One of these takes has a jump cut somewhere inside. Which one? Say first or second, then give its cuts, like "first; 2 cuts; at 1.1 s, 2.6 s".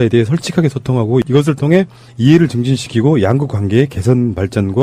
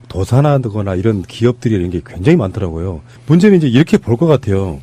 second; 1 cut; at 3.5 s